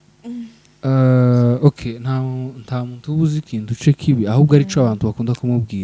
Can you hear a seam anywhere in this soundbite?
no; 0 cuts

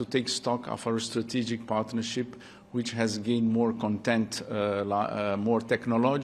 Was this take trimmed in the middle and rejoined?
no; 0 cuts

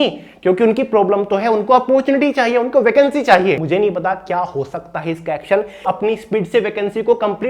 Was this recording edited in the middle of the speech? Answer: yes; 2 cuts; at 3.6 s, 5.8 s

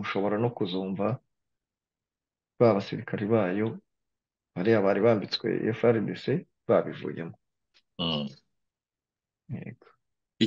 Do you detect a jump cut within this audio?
no; 0 cuts

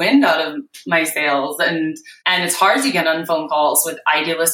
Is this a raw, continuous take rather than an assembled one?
no; 1 cut; at 2.1 s

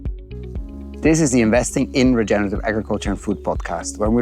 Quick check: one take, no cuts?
no; 1 cut; at 1.0 s

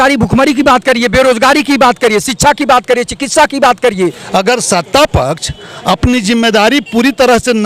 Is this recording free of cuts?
no; 1 cut; at 4.2 s

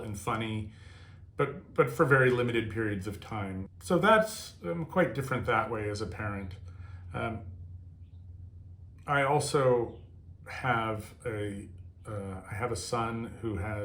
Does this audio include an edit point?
yes; 1 cut; at 3.7 s

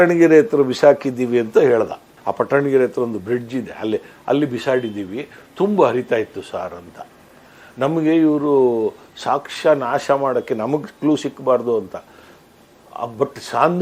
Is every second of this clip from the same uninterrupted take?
yes; 0 cuts

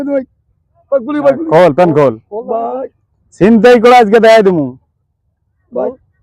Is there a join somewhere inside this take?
yes; 1 cut; at 4.5 s

